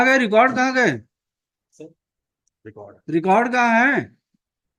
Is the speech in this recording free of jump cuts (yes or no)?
yes